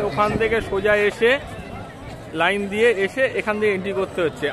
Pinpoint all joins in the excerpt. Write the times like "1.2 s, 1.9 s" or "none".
none